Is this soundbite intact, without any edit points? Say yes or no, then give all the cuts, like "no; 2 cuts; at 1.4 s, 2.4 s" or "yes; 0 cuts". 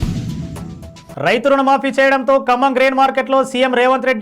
no; 1 cut; at 1.0 s